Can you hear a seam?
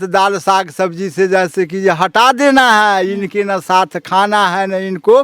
no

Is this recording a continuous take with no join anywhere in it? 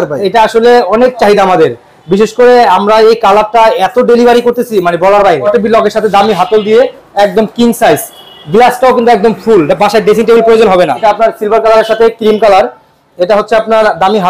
no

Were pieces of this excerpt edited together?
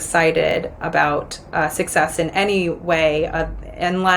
no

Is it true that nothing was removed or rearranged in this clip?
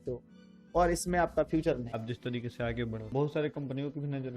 no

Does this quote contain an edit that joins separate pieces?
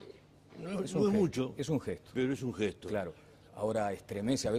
no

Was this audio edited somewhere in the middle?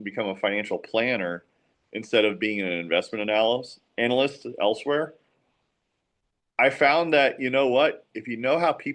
no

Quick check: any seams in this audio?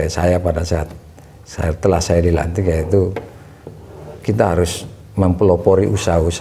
no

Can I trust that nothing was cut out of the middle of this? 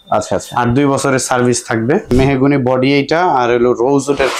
no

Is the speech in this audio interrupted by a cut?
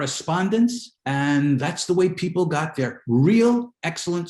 yes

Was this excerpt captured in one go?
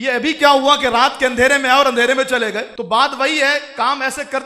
yes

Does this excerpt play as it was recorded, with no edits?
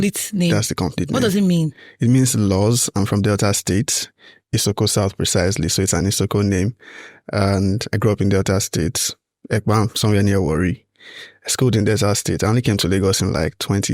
yes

